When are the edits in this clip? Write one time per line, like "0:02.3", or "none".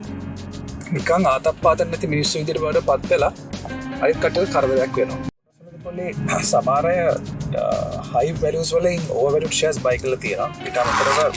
0:05.6